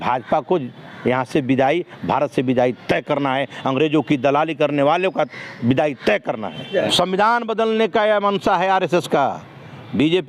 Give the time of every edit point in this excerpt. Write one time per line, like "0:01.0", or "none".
none

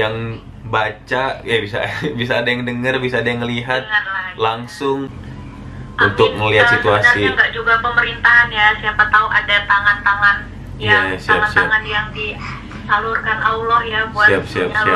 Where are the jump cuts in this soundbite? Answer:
0:05.1

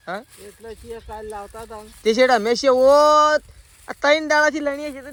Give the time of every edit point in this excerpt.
none

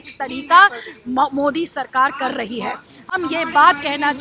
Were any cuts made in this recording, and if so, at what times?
none

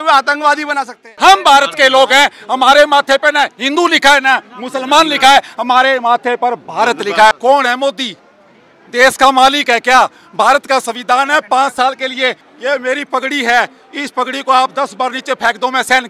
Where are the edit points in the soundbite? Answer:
0:01.1
0:07.3
0:12.4

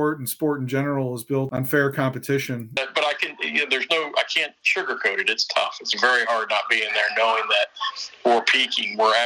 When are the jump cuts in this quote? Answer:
0:01.5
0:02.8

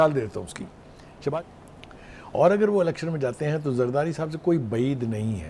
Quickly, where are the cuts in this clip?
0:01.5

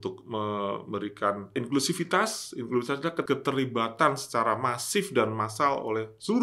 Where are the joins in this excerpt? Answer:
0:01.5
0:03.2

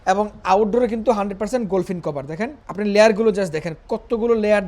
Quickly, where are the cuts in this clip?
0:02.6

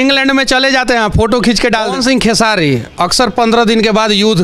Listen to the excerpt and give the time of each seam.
0:01.9

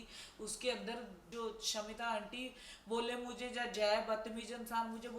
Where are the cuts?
0:01.2

